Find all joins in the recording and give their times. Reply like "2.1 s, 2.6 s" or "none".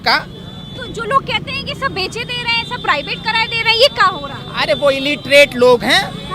none